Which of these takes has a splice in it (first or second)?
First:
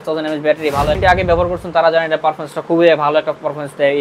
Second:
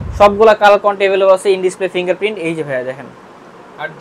first